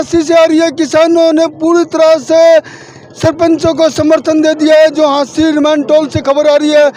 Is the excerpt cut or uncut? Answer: uncut